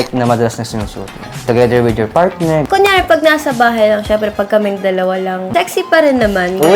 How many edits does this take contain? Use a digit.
3